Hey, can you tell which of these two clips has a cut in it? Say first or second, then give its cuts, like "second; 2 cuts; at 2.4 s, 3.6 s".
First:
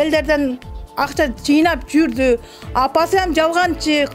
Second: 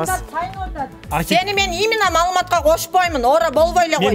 second; 1 cut; at 1.1 s